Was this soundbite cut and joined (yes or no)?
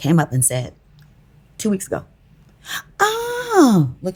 no